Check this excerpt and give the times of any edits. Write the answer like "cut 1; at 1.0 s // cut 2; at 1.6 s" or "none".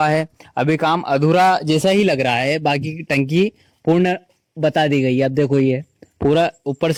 none